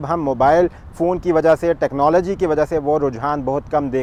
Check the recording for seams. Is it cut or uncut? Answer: uncut